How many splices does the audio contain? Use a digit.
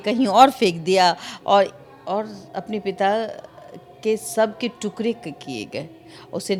0